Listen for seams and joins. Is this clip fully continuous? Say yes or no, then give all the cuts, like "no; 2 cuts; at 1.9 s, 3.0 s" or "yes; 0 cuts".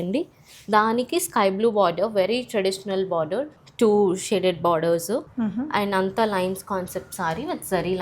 no; 2 cuts; at 3.6 s, 5.3 s